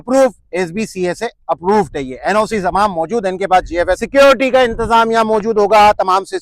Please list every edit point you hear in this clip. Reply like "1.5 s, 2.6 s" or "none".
4.0 s